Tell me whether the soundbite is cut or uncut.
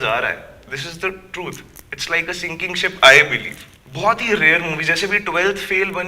uncut